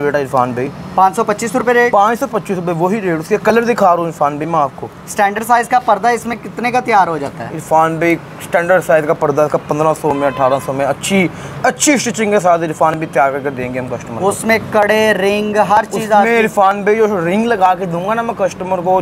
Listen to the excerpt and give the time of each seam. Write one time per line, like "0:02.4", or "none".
none